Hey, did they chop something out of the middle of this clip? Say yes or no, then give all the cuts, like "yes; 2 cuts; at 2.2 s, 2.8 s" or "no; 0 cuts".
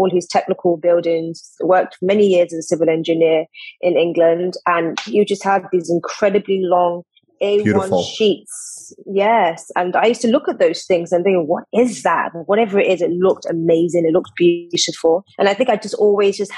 no; 0 cuts